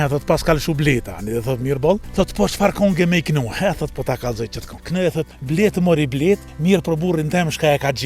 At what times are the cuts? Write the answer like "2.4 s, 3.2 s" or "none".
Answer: 2.1 s, 5.2 s, 6.5 s